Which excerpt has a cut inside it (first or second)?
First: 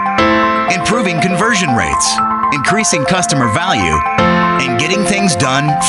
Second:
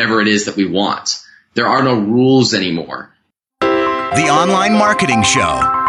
second